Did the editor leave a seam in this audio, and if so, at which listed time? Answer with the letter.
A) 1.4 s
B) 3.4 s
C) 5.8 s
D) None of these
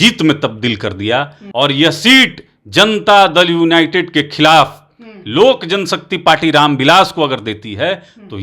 A